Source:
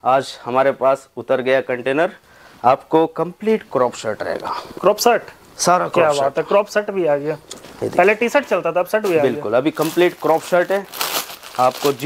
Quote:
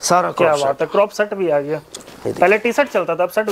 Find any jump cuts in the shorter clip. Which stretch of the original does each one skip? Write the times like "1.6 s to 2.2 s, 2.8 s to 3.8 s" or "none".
none